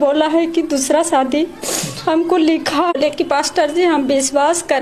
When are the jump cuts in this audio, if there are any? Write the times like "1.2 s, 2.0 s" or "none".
2.9 s